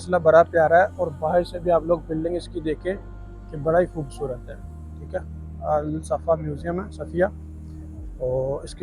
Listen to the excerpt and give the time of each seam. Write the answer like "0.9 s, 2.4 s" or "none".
none